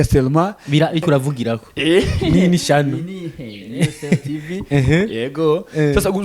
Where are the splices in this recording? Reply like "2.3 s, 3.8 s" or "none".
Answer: 1.0 s